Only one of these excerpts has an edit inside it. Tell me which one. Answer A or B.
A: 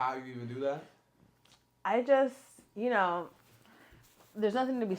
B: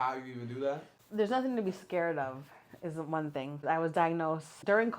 B